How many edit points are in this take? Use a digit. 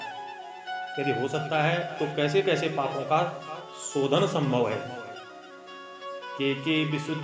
0